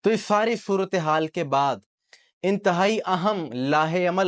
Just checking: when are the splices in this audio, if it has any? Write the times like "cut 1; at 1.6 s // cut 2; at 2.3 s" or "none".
none